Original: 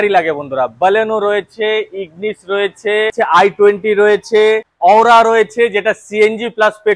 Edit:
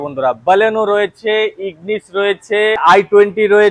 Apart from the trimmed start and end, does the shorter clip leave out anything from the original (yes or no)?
yes